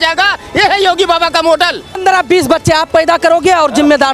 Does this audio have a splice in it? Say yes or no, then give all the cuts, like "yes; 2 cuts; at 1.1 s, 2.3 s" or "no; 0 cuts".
yes; 1 cut; at 2.0 s